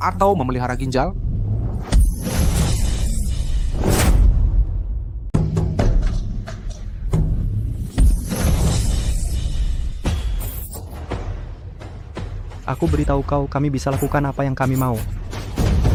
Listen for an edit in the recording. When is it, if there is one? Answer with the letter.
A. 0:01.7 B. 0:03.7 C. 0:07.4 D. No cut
D